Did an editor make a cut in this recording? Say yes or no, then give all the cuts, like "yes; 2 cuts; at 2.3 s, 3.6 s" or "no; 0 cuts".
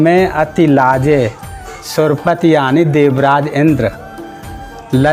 no; 0 cuts